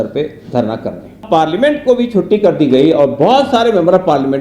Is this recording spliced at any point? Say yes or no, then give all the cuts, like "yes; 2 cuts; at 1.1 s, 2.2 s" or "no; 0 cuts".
yes; 1 cut; at 1.2 s